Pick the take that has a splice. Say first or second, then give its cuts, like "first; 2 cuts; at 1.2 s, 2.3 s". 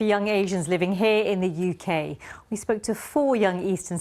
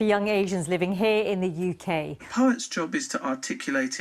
second; 1 cut; at 2.3 s